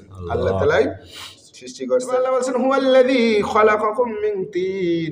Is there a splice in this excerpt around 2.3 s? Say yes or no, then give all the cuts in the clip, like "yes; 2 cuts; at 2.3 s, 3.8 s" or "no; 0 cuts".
yes; 1 cut; at 2.3 s